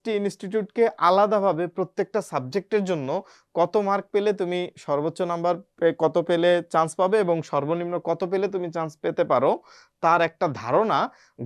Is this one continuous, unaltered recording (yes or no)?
yes